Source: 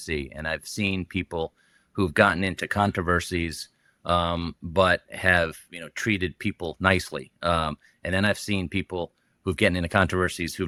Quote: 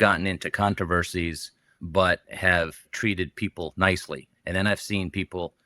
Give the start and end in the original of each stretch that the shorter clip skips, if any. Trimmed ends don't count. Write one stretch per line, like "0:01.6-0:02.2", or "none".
0:03.9-0:04.5
0:05.7-0:05.9
0:07.3-0:07.9